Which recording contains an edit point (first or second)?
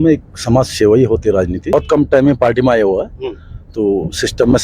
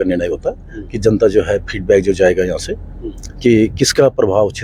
first